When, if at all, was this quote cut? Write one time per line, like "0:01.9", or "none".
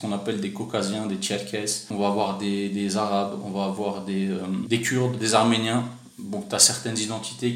0:01.9
0:04.6